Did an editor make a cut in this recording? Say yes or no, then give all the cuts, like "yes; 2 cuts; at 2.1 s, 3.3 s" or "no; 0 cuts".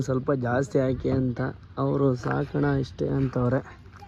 no; 0 cuts